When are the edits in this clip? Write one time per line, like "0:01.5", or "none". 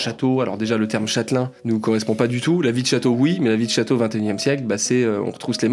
0:01.5